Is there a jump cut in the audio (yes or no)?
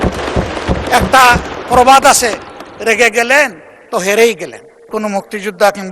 yes